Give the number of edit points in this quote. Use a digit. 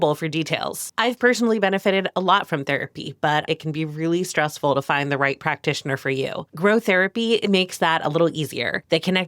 4